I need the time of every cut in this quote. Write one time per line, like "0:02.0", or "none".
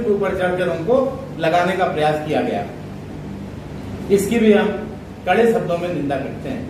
none